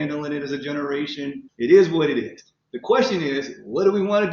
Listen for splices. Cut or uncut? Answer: cut